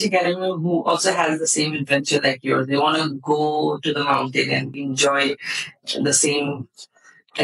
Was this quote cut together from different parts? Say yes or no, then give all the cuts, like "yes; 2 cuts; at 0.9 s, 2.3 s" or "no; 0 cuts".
no; 0 cuts